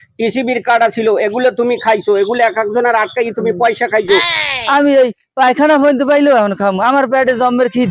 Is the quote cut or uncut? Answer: cut